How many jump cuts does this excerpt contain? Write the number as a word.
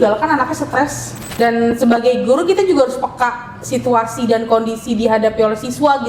one